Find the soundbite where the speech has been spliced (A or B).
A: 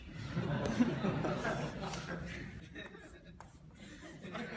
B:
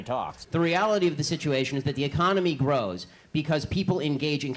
B